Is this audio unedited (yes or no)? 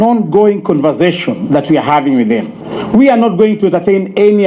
no